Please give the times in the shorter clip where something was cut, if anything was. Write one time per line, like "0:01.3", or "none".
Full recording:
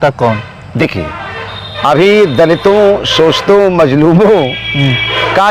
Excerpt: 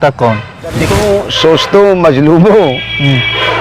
0:00.9